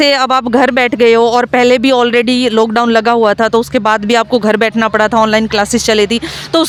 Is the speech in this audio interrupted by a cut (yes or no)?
no